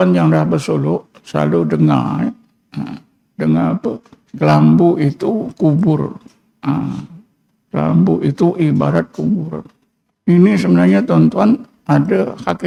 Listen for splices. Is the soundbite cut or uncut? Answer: uncut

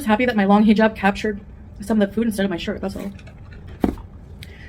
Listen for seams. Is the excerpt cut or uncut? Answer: uncut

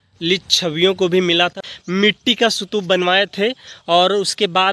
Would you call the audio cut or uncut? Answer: cut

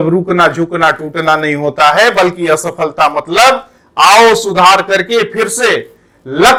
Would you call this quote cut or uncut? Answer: uncut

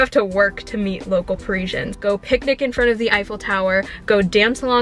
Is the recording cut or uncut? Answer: cut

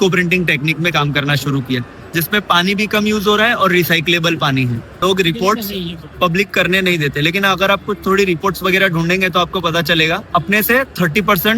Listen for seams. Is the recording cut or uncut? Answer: cut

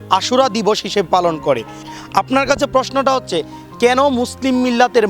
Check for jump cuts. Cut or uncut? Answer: cut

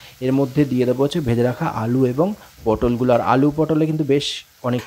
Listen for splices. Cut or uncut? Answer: uncut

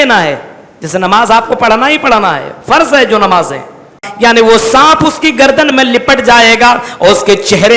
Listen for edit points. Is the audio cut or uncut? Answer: cut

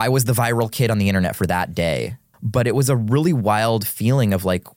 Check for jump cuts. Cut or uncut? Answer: cut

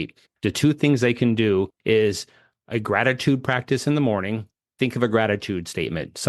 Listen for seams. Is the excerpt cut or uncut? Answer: cut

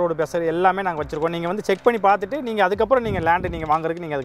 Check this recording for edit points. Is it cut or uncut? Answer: uncut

